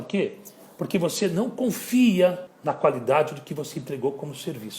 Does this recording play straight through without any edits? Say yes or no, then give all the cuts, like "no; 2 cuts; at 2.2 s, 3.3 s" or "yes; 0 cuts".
no; 1 cut; at 2.5 s